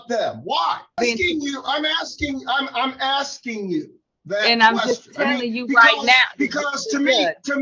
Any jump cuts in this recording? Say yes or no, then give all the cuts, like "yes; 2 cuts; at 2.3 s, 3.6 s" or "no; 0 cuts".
yes; 1 cut; at 0.9 s